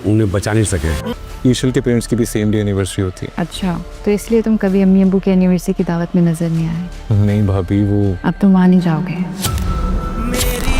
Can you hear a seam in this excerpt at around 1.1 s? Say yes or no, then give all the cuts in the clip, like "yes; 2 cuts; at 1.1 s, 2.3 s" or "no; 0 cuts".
yes; 1 cut; at 1.1 s